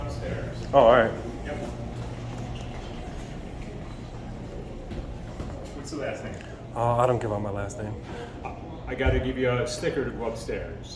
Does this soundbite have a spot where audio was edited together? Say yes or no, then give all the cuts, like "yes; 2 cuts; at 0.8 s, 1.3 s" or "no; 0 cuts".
no; 0 cuts